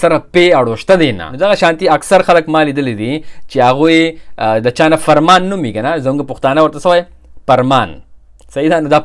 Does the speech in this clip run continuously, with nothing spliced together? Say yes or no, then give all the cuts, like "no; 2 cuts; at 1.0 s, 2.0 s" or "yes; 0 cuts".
no; 1 cut; at 1.3 s